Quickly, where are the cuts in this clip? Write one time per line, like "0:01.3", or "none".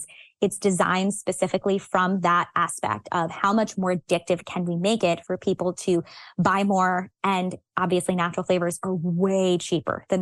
0:03.8